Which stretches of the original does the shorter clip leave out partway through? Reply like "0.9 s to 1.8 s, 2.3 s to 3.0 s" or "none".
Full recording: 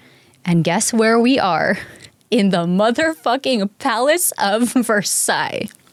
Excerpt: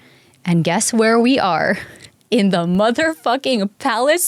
none